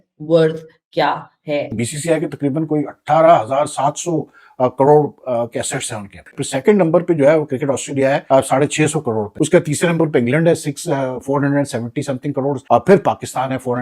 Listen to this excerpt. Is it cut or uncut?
cut